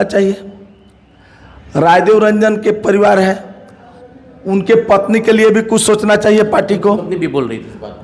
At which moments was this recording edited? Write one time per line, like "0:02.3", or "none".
none